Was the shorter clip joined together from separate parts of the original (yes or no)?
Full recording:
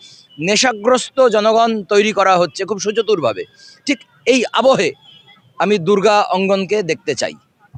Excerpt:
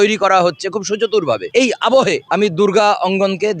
yes